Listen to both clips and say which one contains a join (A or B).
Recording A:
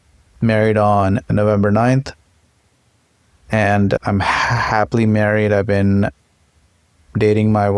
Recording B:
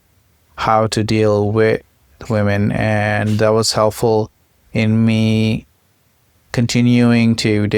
A